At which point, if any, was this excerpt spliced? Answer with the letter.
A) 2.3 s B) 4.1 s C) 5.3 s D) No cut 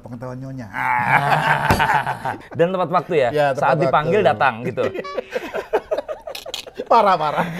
A